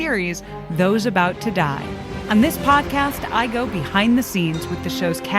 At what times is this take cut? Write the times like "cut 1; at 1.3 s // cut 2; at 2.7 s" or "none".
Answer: cut 1; at 2.1 s